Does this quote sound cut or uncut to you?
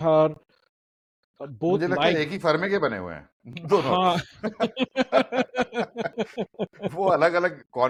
uncut